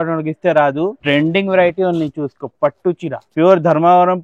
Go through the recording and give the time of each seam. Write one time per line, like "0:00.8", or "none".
0:01.0
0:03.2